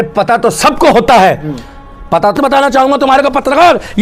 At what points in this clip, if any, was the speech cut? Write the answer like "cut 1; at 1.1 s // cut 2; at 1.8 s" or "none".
cut 1; at 2.4 s